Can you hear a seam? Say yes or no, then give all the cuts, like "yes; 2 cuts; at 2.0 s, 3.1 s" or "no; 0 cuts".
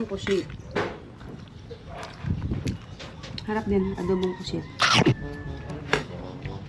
no; 0 cuts